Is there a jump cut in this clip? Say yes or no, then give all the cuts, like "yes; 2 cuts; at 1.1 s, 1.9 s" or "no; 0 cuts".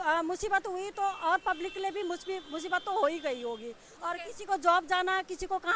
no; 0 cuts